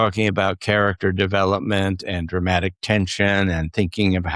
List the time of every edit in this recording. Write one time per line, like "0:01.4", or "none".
none

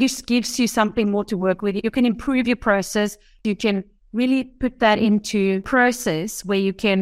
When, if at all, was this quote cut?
0:03.4
0:05.7

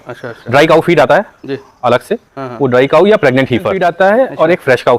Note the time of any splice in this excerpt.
0:03.8

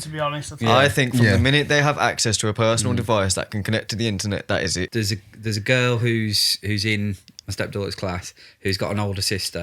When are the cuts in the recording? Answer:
0:04.9

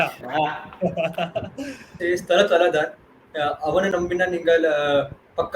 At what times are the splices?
0:01.9

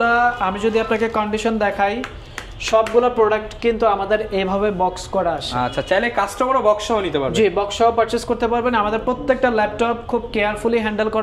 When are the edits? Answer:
none

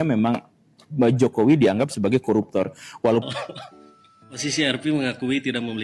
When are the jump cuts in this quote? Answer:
0:03.2

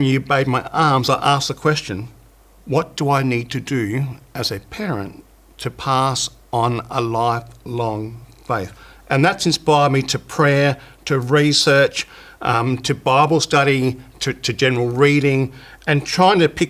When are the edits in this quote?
none

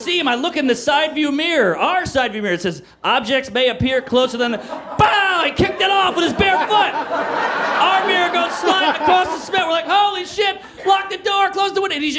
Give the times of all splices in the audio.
none

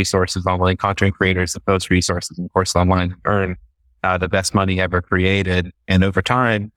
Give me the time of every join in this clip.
none

